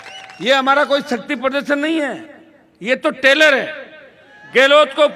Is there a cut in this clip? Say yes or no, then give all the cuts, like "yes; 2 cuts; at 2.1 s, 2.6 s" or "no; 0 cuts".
no; 0 cuts